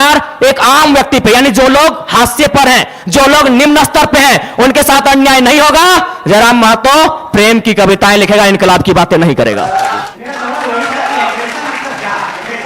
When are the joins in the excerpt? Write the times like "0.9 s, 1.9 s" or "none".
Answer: 10.0 s